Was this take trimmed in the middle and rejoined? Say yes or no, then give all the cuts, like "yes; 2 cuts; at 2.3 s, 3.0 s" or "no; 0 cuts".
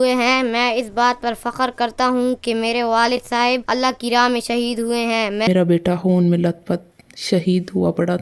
yes; 1 cut; at 5.5 s